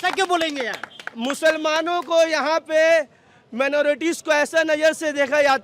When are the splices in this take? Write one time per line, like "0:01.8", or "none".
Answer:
none